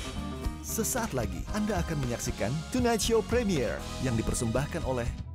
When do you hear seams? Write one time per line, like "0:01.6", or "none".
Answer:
none